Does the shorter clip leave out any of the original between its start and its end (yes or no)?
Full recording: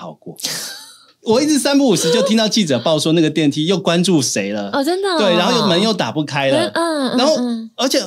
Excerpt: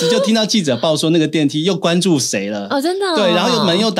no